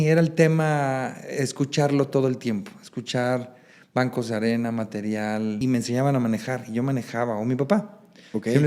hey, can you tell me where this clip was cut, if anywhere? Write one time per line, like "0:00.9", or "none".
0:05.6